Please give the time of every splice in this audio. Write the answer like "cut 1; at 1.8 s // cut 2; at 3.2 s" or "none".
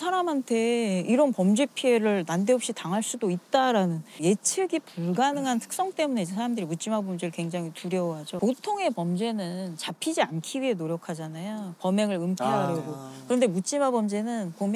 cut 1; at 8.3 s